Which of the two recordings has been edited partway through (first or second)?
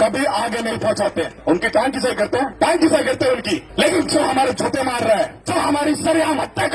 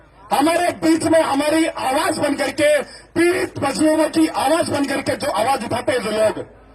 first